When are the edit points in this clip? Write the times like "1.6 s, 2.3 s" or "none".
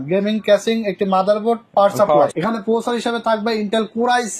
2.3 s